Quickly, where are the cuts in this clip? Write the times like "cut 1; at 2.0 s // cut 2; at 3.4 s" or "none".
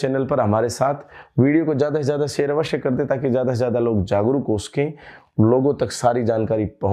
none